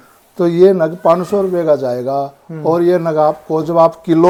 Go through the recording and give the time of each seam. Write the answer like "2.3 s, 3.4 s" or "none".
none